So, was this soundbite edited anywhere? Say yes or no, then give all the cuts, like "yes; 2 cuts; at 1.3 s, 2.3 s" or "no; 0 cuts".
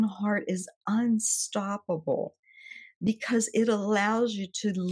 no; 0 cuts